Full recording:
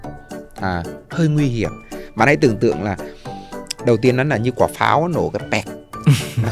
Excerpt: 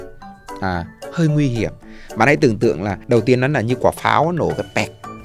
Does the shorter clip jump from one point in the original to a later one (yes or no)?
yes